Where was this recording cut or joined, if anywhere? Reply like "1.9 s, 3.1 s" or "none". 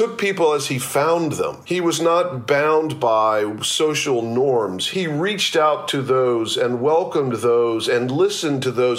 1.6 s, 4.8 s